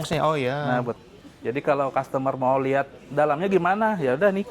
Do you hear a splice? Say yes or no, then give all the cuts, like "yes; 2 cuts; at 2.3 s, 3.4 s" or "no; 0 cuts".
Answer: yes; 1 cut; at 1.0 s